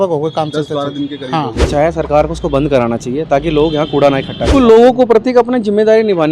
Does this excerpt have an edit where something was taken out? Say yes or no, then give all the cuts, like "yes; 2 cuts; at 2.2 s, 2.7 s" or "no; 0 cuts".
yes; 2 cuts; at 1.7 s, 4.5 s